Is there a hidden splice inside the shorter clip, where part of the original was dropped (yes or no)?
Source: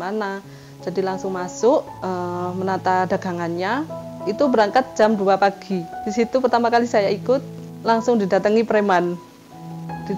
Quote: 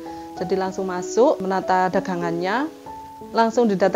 yes